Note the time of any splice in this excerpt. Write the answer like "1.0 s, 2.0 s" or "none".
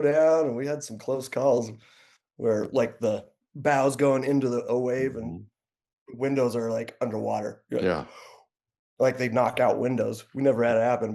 none